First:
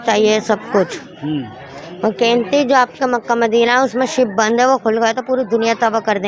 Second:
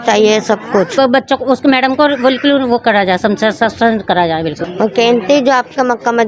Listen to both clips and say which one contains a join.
second; 2 cuts; at 0.9 s, 4.6 s

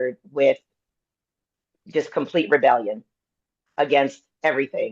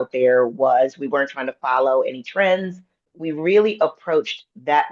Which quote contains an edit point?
second; 1 cut; at 3.1 s

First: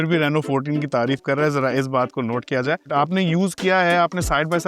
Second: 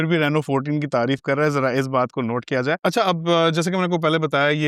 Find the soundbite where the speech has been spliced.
first; 1 cut; at 2.8 s

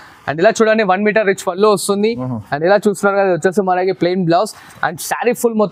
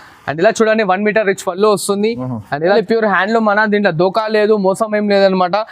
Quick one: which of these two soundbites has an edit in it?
second; 1 cut; at 2.8 s

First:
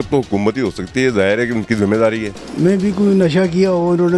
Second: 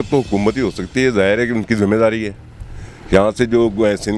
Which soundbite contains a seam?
first; 1 cut; at 2.4 s

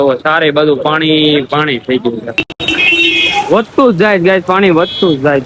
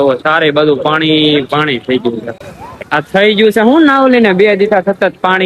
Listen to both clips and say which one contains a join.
first; 1 cut; at 2.6 s

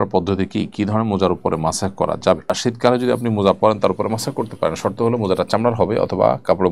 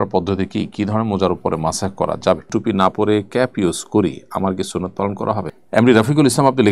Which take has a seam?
second; 2 cuts; at 2.5 s, 5.5 s

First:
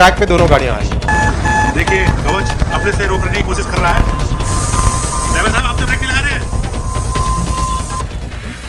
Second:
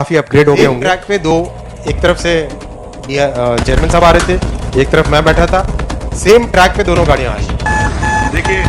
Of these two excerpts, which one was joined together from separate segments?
second; 1 cut; at 1.3 s

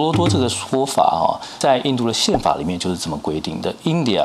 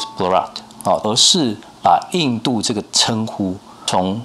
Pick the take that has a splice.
second; 1 cut; at 1.0 s

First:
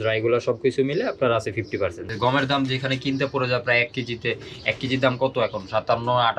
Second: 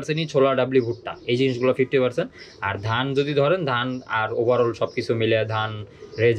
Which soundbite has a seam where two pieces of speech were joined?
first; 1 cut; at 2.0 s

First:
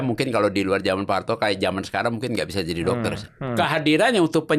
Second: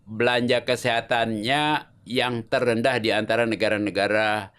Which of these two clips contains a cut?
first; 1 cut; at 3.6 s

